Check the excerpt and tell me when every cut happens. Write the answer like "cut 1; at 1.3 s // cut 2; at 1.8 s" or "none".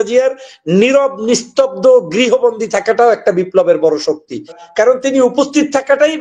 cut 1; at 4.6 s